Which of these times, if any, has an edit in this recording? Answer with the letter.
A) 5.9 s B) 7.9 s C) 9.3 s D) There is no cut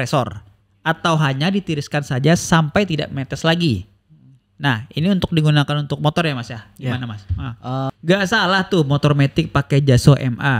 B